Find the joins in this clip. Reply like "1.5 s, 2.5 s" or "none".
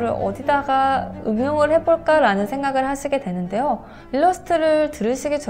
3.9 s